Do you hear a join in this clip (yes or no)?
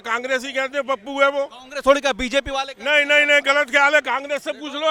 no